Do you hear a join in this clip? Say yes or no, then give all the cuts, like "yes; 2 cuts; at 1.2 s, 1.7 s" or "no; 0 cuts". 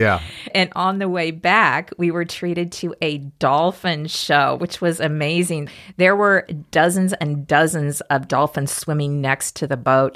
no; 0 cuts